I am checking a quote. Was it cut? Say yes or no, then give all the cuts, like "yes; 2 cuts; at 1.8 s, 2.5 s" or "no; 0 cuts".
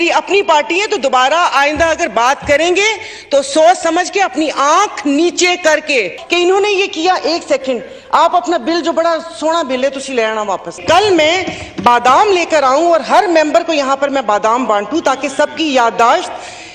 yes; 2 cuts; at 6.2 s, 10.8 s